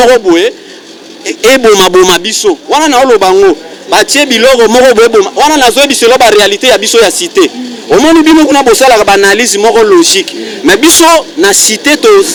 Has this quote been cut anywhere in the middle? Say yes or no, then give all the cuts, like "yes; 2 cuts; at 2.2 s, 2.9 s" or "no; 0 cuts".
no; 0 cuts